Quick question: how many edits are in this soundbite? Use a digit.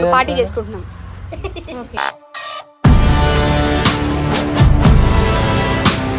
1